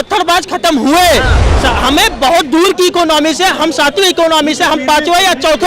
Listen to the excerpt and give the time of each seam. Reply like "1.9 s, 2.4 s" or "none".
1.4 s